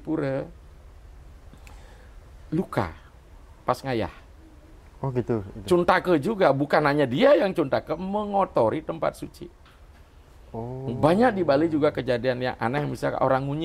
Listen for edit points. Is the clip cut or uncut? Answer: uncut